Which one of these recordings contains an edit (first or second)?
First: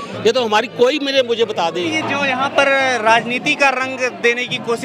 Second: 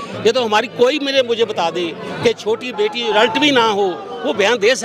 first